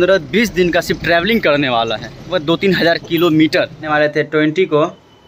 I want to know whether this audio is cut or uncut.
cut